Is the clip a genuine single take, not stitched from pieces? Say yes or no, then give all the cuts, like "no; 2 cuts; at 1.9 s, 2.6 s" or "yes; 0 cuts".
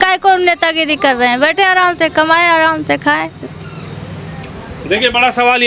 yes; 0 cuts